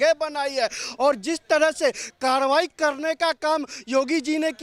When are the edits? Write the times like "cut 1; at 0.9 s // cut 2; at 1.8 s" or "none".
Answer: none